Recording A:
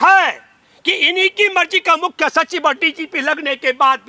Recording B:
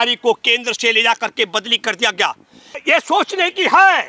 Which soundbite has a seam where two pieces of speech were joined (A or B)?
B